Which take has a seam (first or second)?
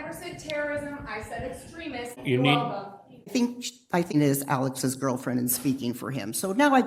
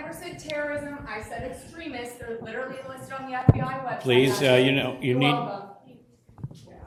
first